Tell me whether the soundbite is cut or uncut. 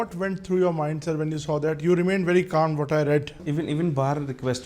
cut